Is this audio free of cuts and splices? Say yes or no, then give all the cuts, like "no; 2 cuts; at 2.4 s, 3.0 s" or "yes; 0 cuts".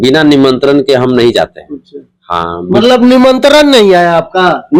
yes; 0 cuts